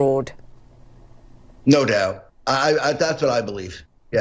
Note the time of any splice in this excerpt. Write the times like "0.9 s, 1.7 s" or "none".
none